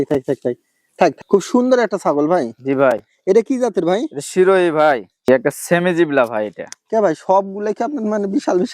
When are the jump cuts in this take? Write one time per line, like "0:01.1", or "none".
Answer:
0:01.2
0:05.3